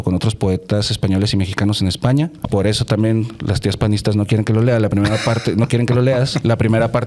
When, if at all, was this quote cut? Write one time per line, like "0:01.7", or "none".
0:02.4

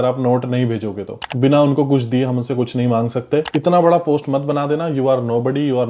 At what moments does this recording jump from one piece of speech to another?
0:01.3
0:03.5

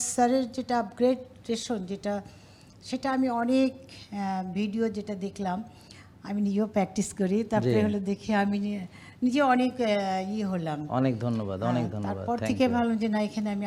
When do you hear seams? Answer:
none

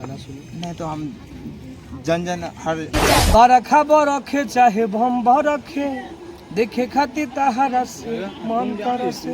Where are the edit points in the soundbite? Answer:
0:03.2

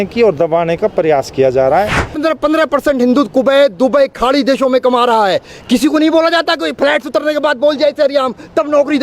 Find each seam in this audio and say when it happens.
0:02.2

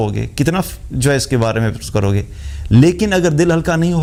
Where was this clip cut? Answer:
none

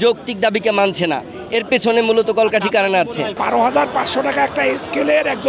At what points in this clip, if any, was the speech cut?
0:03.4

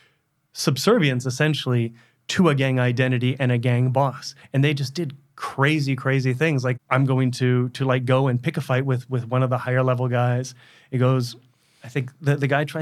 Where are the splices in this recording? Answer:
0:06.8

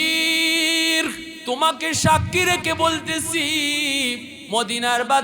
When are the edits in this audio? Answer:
0:01.3
0:04.3

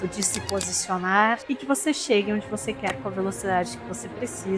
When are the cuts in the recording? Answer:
0:01.4

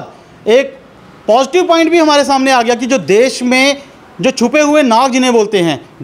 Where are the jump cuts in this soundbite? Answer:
none

